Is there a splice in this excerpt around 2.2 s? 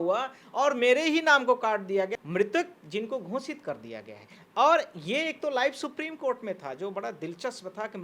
yes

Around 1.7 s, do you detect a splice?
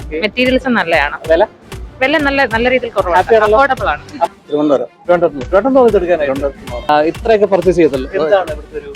no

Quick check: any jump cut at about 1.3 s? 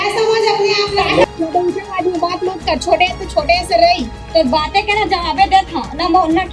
yes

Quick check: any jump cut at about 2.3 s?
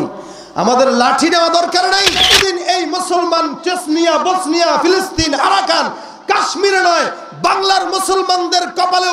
yes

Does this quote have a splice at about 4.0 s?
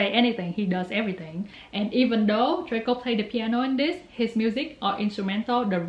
no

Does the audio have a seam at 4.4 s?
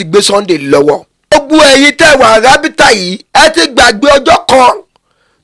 no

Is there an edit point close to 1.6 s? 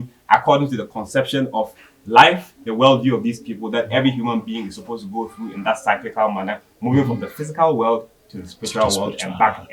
no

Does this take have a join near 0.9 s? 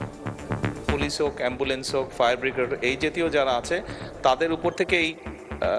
yes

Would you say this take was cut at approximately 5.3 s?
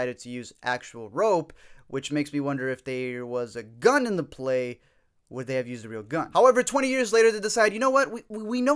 no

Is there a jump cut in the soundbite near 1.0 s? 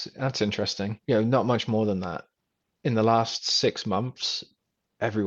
yes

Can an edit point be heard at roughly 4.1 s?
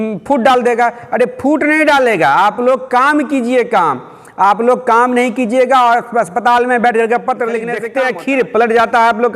no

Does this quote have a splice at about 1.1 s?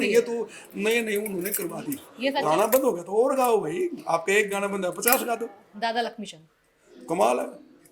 no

